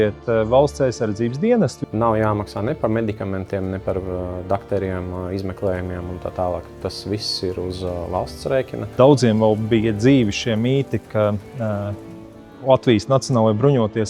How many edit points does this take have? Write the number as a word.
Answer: two